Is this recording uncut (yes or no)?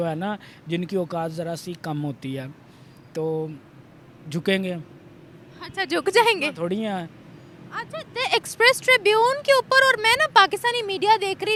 yes